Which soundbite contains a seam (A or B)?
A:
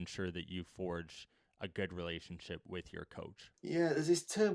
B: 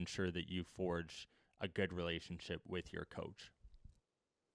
A